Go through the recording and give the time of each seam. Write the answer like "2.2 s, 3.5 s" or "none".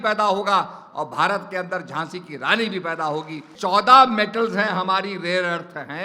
3.5 s